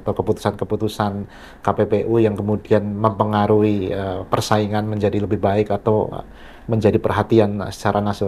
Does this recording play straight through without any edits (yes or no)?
yes